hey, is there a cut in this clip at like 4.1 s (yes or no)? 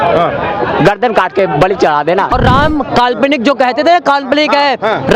no